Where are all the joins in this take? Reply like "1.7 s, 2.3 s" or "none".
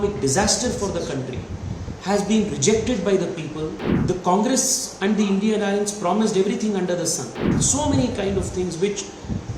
3.9 s, 7.5 s

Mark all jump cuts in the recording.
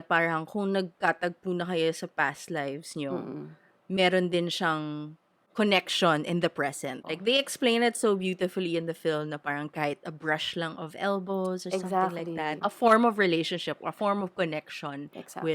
7.1 s, 12.6 s

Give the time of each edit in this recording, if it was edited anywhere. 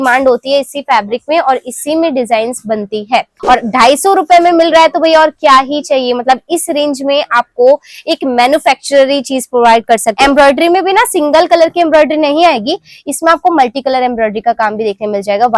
3.3 s, 10.1 s

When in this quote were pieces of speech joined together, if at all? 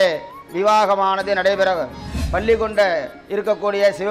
2.1 s

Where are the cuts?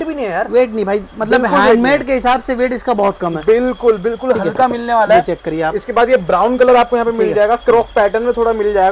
none

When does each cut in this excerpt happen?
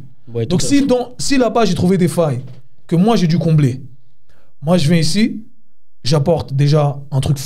none

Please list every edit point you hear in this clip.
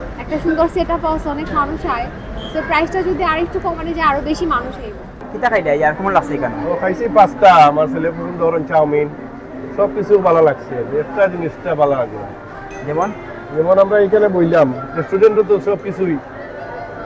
5.2 s

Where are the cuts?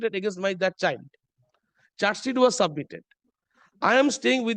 none

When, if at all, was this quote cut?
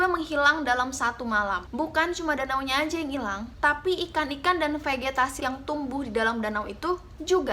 1.6 s, 5.4 s

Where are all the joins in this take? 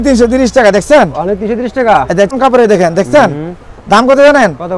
2.3 s

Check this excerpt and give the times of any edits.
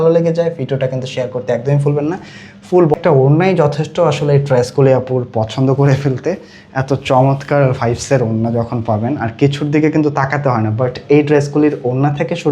2.9 s

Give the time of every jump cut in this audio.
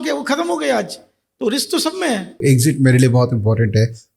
2.4 s

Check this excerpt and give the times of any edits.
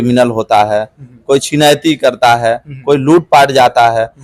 none

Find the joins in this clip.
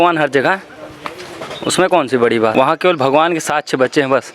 2.5 s

